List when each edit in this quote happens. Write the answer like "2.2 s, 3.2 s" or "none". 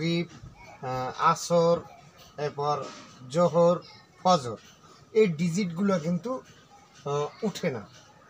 none